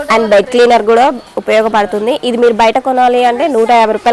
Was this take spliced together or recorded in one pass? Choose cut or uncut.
uncut